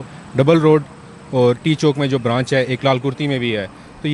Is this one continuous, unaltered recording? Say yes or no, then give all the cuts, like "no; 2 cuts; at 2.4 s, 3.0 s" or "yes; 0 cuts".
yes; 0 cuts